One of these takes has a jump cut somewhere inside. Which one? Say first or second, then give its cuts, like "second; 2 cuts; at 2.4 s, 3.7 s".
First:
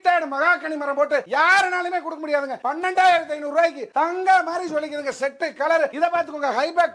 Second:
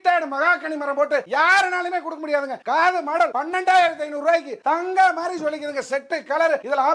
first; 2 cuts; at 2.6 s, 5.9 s